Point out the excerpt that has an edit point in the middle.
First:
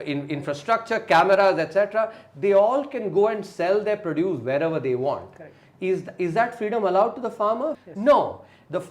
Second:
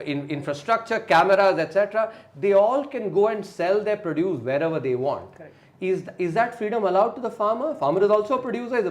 first; 1 cut; at 7.8 s

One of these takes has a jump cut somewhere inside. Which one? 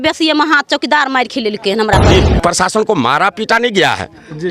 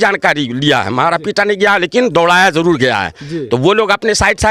first; 1 cut; at 2.1 s

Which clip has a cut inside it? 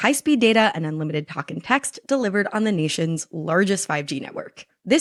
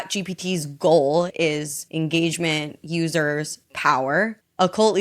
second; 1 cut; at 1.3 s

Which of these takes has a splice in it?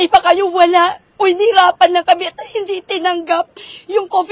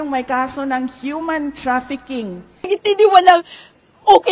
second; 1 cut; at 2.7 s

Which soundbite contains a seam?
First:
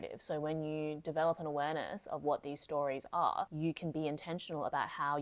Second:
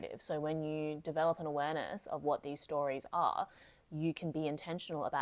first; 1 cut; at 3.5 s

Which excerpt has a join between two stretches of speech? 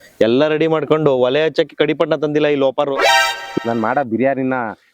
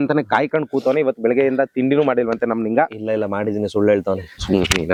first; 1 cut; at 3.5 s

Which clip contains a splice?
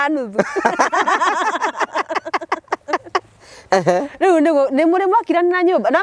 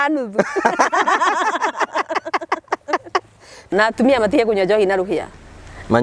second; 1 cut; at 3.7 s

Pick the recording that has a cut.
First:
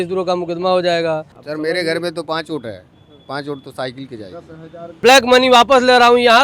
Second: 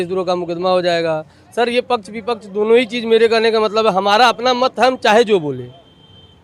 first; 2 cuts; at 1.4 s, 4.8 s

